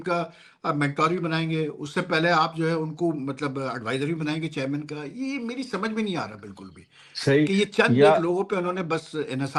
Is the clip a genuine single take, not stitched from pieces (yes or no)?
yes